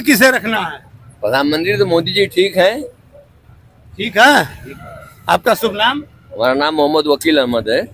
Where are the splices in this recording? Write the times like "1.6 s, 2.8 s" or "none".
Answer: none